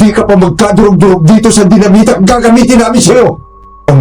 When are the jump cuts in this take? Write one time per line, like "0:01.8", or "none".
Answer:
none

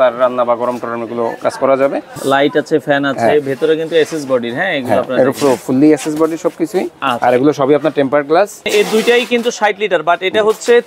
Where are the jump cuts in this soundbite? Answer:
0:02.2
0:08.6

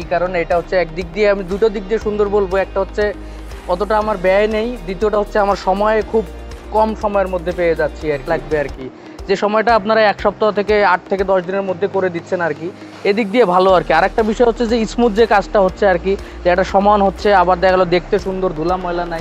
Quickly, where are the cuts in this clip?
0:08.2

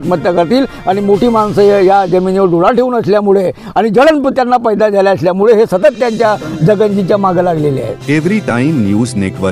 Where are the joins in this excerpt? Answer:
0:07.9

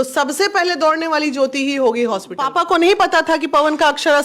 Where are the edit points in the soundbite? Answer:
0:02.4

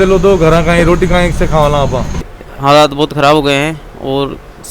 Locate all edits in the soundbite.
0:02.2

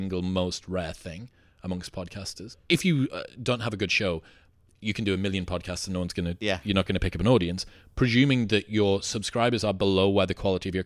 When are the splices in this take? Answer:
0:02.5

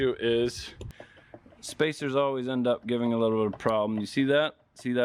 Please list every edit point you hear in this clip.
none

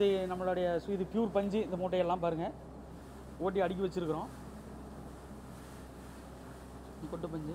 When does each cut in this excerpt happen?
none

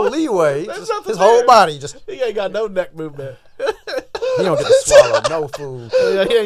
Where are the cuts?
0:04.1

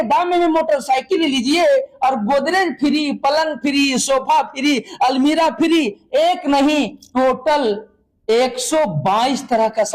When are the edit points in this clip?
none

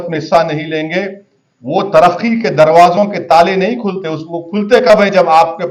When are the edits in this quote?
none

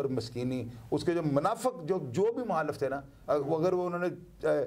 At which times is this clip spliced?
none

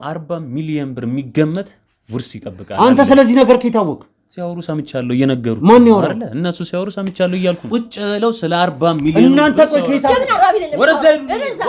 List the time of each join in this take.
0:07.6

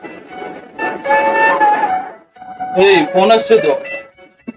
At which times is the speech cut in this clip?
none

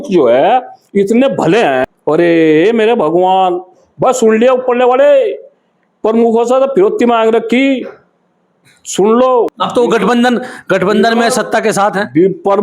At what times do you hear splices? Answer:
0:01.8
0:09.5

